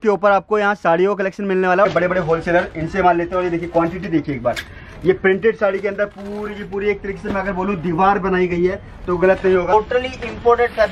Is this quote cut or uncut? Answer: cut